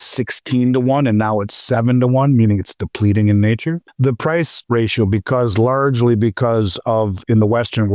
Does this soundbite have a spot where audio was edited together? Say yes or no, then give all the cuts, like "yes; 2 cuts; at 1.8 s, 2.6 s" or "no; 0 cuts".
yes; 2 cuts; at 3.9 s, 4.6 s